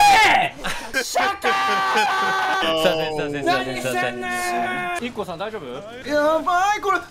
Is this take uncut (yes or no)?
no